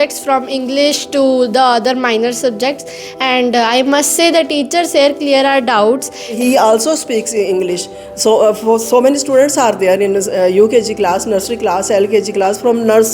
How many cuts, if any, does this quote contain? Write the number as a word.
one